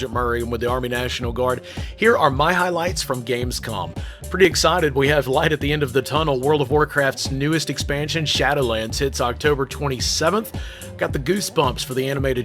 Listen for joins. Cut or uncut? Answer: uncut